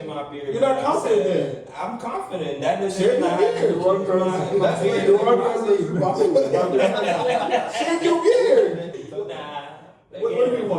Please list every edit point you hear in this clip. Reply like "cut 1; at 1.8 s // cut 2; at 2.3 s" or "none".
cut 1; at 9.0 s